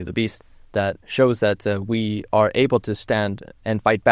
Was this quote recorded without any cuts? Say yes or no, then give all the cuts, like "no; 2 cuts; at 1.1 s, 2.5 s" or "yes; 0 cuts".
yes; 0 cuts